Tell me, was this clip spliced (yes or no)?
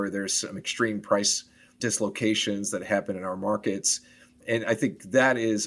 no